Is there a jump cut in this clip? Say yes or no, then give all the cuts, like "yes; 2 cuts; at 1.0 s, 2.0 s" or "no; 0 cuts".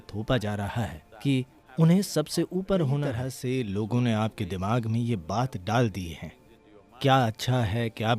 yes; 2 cuts; at 1.6 s, 3.3 s